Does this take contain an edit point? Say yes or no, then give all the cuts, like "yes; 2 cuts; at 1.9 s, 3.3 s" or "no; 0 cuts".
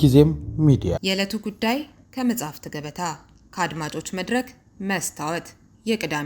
no; 0 cuts